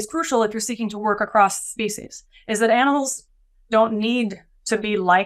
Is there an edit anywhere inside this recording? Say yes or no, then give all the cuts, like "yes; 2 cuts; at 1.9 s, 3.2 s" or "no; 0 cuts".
no; 0 cuts